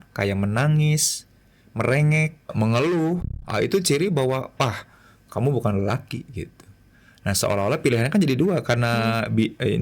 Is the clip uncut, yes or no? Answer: no